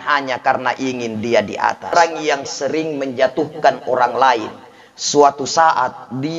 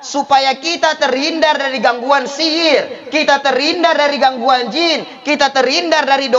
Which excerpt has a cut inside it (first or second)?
first